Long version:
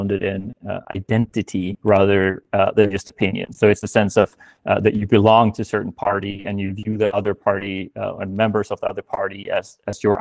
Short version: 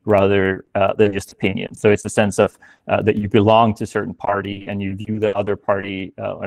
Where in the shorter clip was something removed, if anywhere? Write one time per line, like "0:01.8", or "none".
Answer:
none

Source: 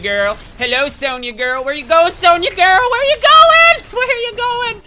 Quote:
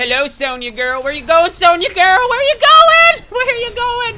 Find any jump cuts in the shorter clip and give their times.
none

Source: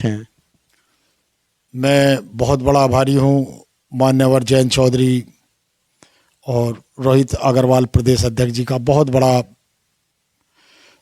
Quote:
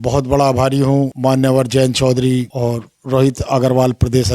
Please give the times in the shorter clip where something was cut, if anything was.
0:01.1
0:02.5

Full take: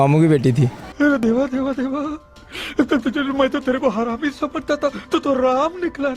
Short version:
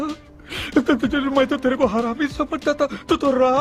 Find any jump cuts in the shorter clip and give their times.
none

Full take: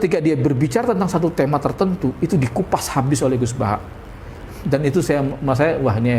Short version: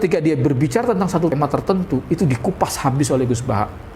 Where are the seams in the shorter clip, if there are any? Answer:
0:01.3

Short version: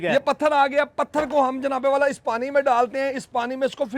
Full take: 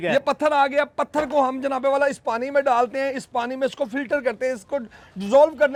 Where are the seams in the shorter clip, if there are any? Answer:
none

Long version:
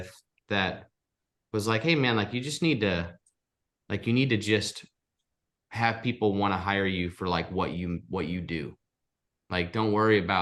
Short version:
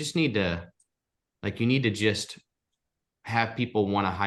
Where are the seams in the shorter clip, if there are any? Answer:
none

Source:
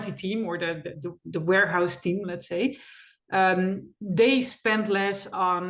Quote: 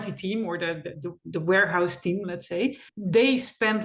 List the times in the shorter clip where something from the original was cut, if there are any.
0:02.9

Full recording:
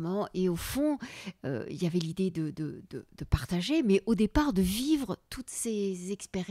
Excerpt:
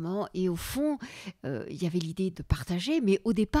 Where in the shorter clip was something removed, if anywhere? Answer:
0:02.3

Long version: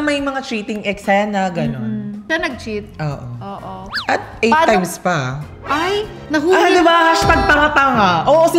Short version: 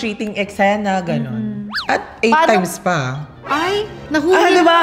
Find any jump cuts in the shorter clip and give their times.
0:01.7

